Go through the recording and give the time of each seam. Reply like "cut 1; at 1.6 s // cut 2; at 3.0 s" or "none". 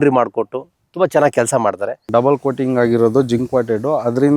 cut 1; at 2.0 s